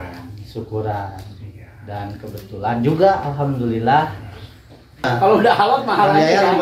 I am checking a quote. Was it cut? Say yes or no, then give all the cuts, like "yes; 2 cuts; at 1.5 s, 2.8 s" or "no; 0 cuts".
yes; 1 cut; at 5.1 s